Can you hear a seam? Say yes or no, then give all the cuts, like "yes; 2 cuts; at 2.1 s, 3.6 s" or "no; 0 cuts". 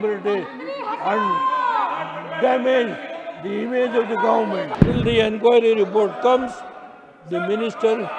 yes; 1 cut; at 4.7 s